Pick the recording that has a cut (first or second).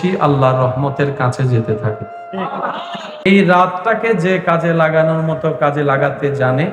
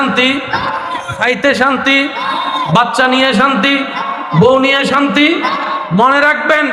first